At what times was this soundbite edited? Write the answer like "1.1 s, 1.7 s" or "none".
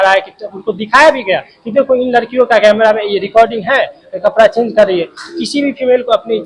none